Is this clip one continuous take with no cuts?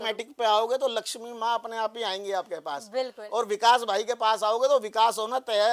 yes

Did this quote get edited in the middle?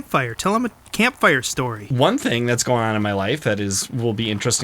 yes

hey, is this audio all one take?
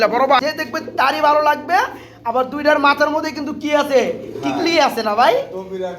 no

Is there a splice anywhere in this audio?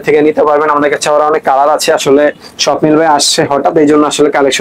no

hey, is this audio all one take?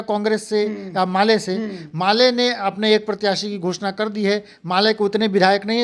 yes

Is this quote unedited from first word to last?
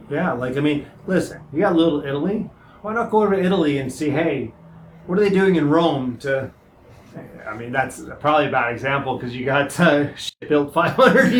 yes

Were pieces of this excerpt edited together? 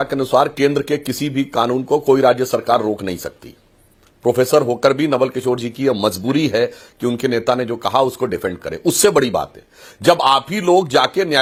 no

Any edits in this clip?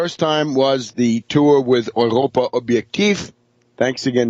yes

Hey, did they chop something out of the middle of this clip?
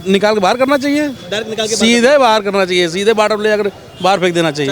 no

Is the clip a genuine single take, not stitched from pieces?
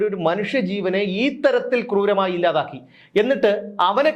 yes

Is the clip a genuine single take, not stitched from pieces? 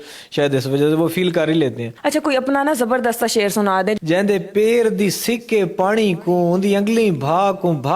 no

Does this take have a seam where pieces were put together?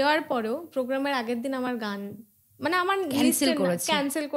no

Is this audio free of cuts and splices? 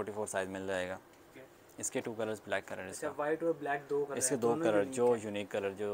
yes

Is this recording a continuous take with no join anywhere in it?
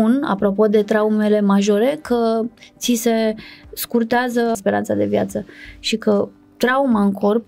yes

